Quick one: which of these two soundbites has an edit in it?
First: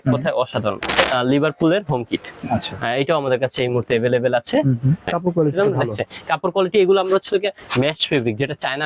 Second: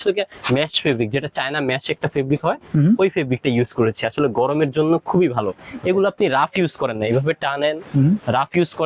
first; 2 cuts; at 1.0 s, 5.1 s

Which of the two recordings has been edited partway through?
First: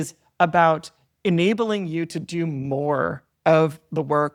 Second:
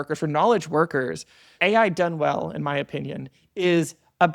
second; 1 cut; at 1.5 s

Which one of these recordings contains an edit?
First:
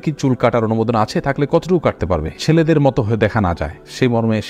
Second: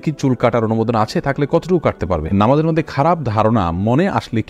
second; 1 cut; at 2.3 s

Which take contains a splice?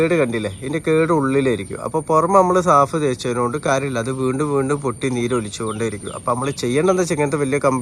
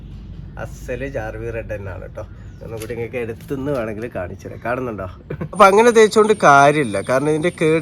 second; 1 cut; at 5.5 s

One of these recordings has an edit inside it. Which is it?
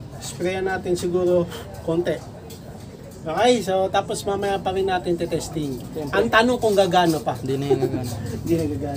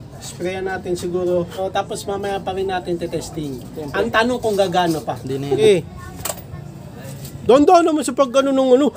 second; 2 cuts; at 1.6 s, 5.6 s

